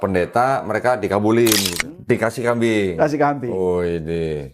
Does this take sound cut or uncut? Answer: cut